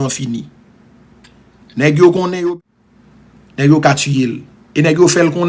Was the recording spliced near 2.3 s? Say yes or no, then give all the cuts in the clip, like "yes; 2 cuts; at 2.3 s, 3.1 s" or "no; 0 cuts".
yes; 1 cut; at 2.3 s